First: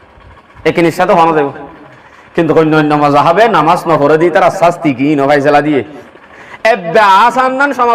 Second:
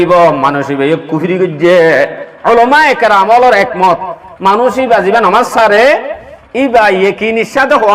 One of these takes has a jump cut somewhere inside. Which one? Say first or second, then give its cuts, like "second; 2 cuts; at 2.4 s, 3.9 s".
first; 1 cut; at 6.0 s